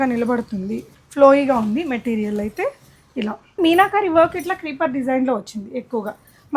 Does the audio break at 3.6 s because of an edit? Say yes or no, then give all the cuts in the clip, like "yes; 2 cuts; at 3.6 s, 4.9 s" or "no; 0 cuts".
yes; 2 cuts; at 1.0 s, 3.6 s